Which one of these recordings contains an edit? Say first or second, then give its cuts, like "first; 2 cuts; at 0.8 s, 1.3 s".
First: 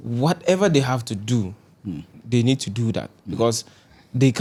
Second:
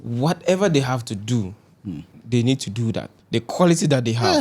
second; 1 cut; at 3.1 s